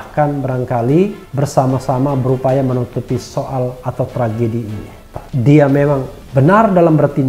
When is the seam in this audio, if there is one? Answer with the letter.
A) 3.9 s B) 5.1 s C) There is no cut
B